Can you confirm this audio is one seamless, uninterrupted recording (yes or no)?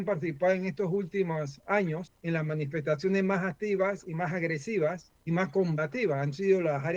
no